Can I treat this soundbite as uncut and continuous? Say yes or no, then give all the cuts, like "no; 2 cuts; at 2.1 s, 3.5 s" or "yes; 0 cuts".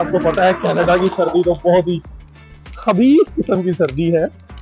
yes; 0 cuts